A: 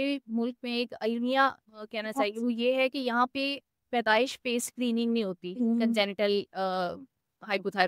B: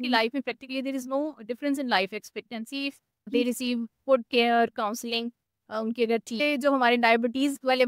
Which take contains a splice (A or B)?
B